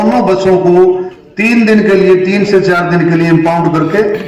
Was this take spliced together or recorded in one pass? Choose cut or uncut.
uncut